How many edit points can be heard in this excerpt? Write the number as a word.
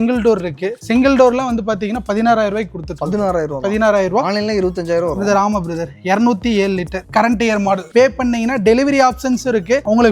one